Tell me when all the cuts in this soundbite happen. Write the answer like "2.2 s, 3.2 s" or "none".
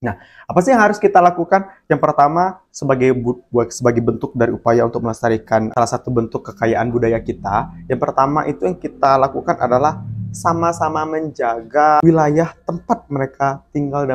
5.7 s, 12.0 s